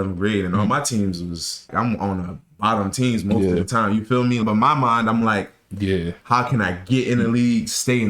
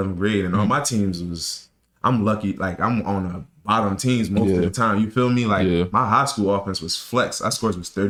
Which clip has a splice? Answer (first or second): first